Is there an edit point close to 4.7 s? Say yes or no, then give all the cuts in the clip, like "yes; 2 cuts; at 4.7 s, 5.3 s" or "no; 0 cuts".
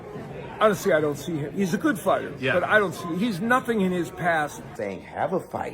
yes; 1 cut; at 4.7 s